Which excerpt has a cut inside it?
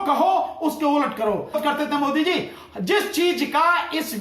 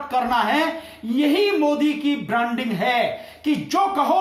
first; 1 cut; at 1.6 s

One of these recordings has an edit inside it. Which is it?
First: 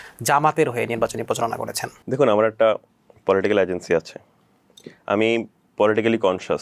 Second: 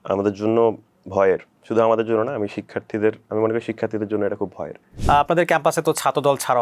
second; 1 cut; at 4.9 s

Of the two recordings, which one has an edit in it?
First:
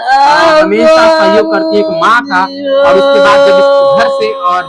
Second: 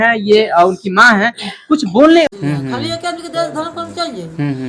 second; 1 cut; at 2.3 s

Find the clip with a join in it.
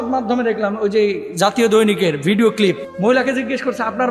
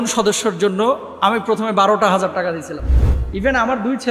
first; 1 cut; at 2.9 s

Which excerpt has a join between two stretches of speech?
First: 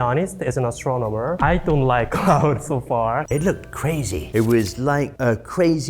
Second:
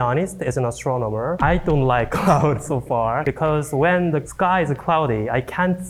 first; 1 cut; at 3.2 s

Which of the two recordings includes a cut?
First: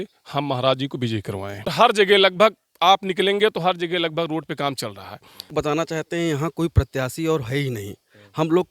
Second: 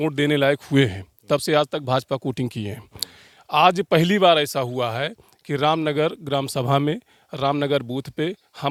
first; 2 cuts; at 1.7 s, 5.5 s

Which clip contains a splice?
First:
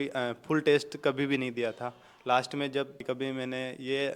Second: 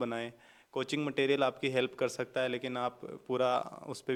first; 1 cut; at 3.0 s

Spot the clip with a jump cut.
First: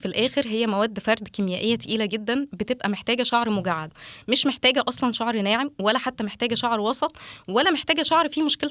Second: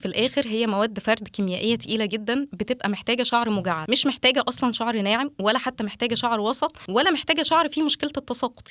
second; 2 cuts; at 3.8 s, 6.8 s

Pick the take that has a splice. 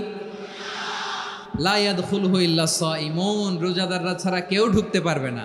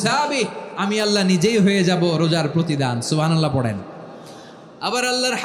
first; 1 cut; at 1.4 s

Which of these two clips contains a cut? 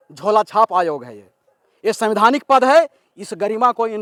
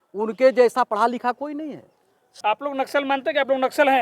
second; 1 cut; at 2.4 s

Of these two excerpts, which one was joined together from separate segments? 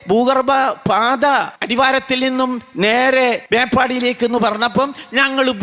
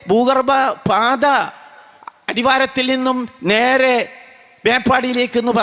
first; 2 cuts; at 1.6 s, 3.4 s

